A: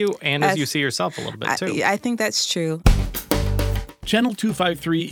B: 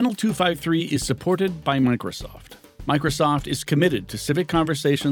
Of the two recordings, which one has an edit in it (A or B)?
A